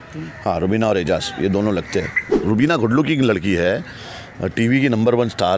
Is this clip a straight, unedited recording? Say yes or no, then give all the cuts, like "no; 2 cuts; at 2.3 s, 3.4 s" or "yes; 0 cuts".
no; 1 cut; at 2.4 s